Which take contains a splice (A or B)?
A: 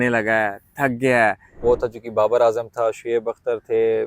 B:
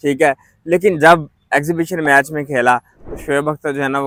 A